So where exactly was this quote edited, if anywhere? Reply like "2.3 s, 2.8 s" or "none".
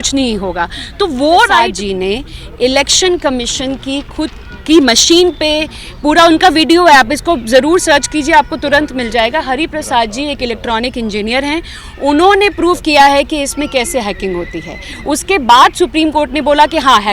1.6 s